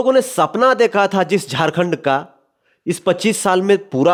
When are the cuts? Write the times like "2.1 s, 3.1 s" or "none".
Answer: none